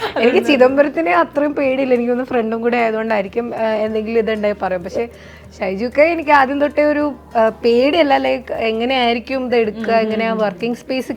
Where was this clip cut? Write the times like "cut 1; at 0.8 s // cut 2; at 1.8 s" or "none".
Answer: none